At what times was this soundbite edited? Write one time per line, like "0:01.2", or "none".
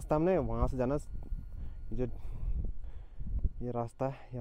none